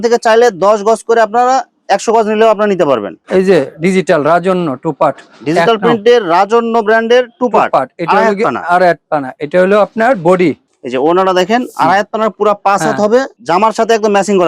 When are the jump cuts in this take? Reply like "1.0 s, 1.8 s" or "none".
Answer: 3.2 s, 10.7 s